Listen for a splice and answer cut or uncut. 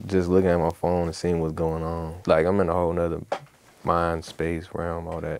cut